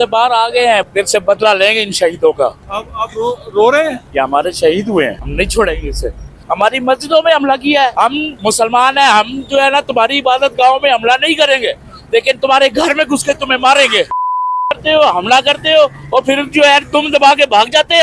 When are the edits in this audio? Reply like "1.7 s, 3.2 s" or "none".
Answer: 4.0 s, 5.2 s, 6.3 s, 8.1 s, 14.1 s